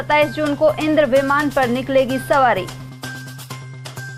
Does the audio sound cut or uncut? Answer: uncut